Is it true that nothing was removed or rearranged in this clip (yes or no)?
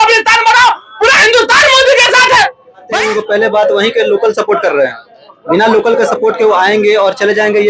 no